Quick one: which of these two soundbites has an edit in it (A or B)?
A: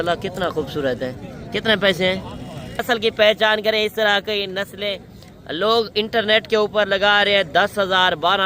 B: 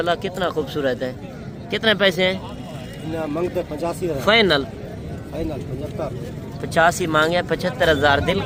A